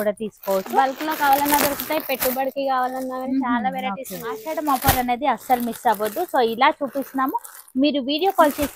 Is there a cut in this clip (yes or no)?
yes